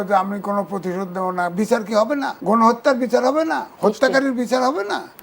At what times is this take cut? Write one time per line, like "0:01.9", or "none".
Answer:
0:02.3